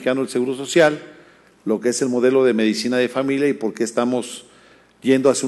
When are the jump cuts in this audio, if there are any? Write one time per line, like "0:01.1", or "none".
none